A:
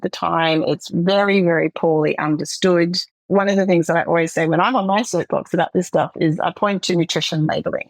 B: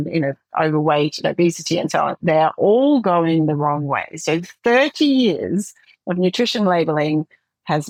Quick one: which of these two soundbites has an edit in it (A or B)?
A